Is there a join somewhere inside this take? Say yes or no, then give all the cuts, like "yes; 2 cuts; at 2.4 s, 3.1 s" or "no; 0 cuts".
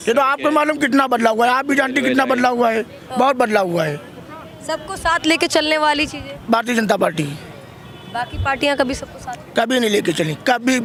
no; 0 cuts